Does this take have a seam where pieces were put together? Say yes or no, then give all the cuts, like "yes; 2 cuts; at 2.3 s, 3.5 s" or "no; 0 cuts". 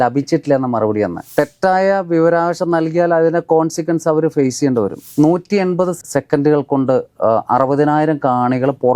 yes; 2 cuts; at 1.2 s, 5.1 s